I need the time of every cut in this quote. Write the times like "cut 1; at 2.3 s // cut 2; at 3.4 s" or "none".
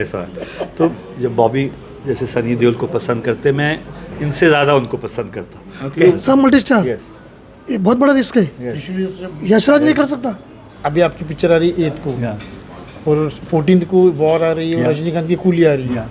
cut 1; at 1.1 s // cut 2; at 6.1 s // cut 3; at 10.7 s